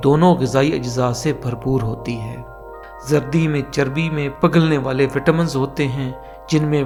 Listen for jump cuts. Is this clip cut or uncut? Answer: uncut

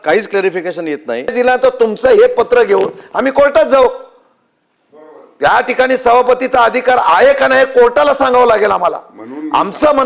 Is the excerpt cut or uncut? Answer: cut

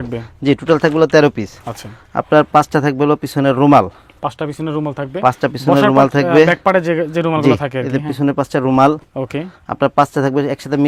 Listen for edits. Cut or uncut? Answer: uncut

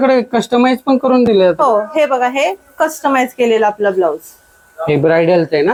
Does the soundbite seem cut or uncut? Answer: uncut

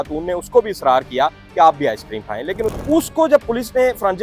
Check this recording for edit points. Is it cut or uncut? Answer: cut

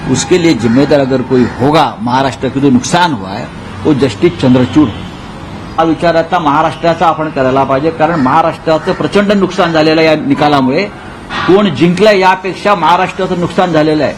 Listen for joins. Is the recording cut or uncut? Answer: cut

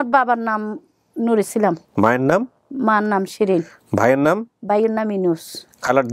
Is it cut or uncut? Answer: uncut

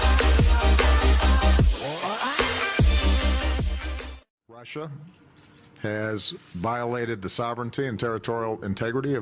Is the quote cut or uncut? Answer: uncut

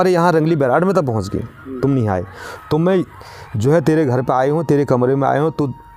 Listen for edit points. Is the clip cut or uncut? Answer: uncut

